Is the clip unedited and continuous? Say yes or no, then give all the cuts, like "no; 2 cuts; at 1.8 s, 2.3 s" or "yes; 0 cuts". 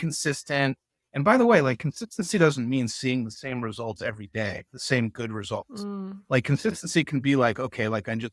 yes; 0 cuts